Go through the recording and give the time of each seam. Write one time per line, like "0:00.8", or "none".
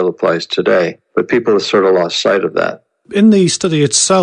0:01.4